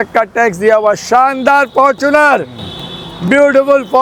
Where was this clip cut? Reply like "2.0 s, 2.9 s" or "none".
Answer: none